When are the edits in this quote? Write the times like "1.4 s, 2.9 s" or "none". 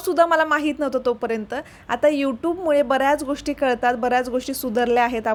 none